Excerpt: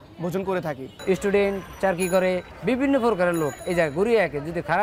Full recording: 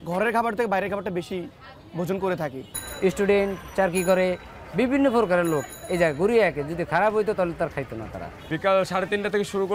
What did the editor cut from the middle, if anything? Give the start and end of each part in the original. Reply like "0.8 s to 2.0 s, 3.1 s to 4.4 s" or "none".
2.7 s to 2.9 s, 4.5 s to 4.6 s, 5.7 s to 5.8 s